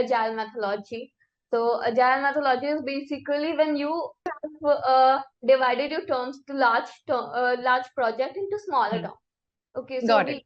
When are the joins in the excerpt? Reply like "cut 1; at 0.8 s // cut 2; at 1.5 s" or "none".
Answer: cut 1; at 4.3 s // cut 2; at 5.3 s